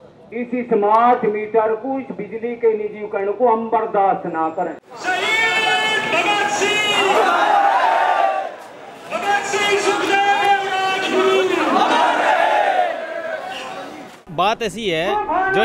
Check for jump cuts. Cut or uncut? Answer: uncut